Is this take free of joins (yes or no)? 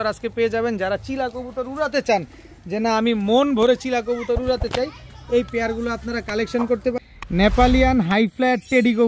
no